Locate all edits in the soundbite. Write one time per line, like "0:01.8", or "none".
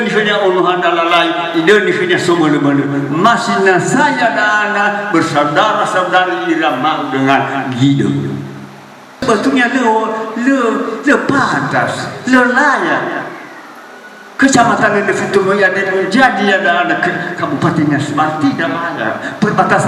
0:09.2

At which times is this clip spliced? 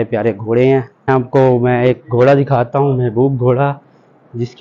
0:01.1

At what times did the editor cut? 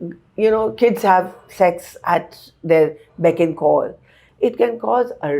0:04.2

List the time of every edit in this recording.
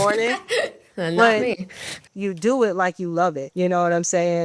0:02.0
0:03.4

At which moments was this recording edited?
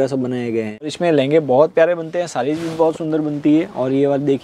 0:00.9

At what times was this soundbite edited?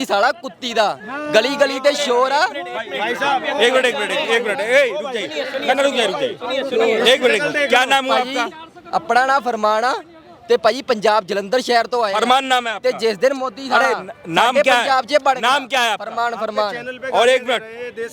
none

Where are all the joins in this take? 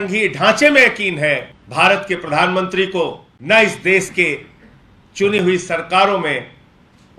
0:01.6
0:03.3

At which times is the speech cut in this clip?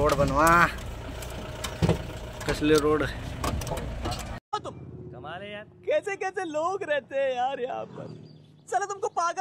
0:00.9
0:04.4

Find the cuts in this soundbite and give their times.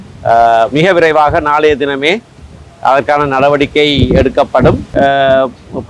0:04.9

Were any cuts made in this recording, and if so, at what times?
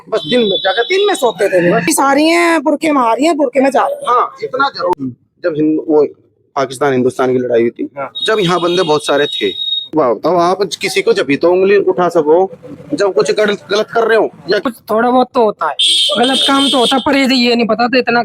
0:01.9
0:04.9
0:09.9
0:14.6

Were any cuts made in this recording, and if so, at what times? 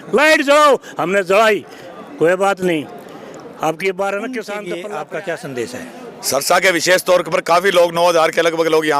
0:04.6

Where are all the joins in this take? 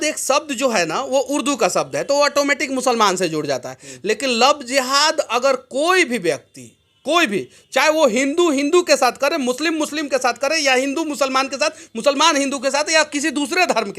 none

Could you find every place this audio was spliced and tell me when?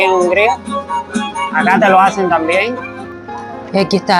0:03.2

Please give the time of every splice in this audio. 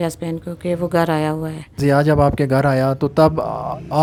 none

